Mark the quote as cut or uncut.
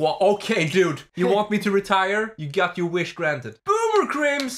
cut